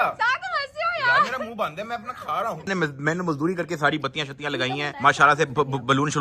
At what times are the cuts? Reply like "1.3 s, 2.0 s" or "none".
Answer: 2.7 s